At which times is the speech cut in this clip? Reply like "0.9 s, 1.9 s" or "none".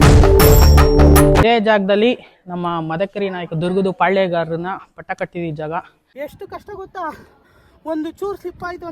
1.4 s, 6.0 s